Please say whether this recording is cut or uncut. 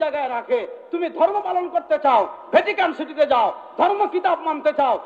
uncut